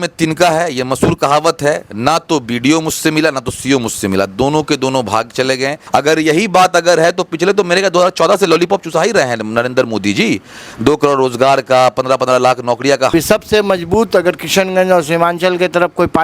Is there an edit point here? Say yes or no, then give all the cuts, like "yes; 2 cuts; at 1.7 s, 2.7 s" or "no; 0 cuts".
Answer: yes; 2 cuts; at 5.8 s, 13.1 s